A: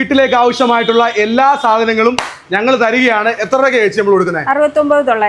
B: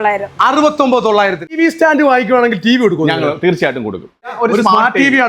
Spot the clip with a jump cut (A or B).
B